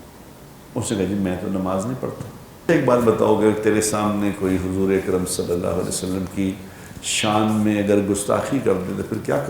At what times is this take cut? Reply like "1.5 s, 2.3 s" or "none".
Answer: 2.7 s